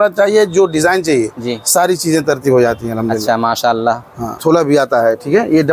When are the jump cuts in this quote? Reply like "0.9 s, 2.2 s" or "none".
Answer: 4.4 s

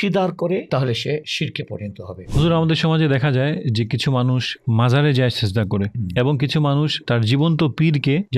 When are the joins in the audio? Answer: 2.3 s

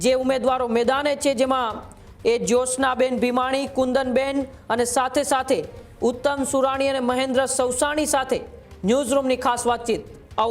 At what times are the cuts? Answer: none

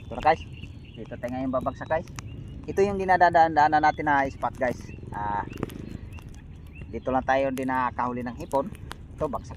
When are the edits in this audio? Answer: none

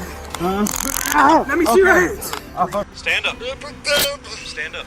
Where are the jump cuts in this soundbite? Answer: 2.9 s

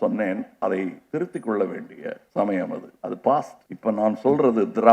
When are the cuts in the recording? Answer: 1.0 s, 2.2 s, 2.9 s, 3.6 s

